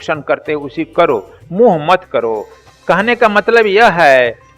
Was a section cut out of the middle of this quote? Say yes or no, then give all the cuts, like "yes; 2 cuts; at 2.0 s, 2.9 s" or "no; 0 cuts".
yes; 1 cut; at 2.6 s